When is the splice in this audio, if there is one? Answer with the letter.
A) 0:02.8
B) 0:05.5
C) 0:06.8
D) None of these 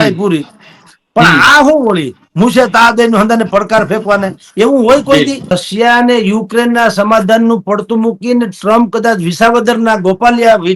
B